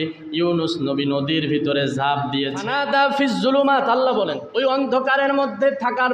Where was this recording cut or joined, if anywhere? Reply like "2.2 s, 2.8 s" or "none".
2.6 s